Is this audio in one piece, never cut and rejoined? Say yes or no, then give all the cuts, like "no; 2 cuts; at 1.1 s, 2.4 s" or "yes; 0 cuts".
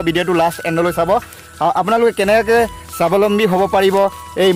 yes; 0 cuts